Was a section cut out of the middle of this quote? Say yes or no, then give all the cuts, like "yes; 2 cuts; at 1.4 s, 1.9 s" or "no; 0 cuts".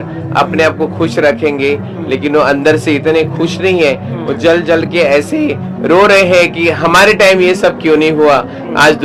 no; 0 cuts